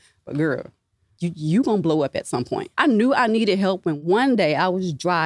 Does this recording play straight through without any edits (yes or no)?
no